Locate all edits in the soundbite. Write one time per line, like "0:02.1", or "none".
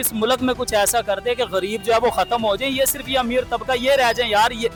none